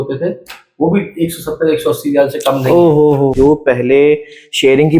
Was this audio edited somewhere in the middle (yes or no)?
yes